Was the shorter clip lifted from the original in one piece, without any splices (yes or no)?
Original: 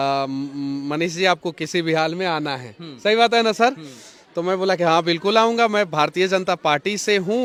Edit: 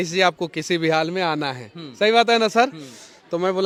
yes